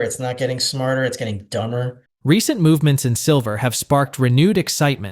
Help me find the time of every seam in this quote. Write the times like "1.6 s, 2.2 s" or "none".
none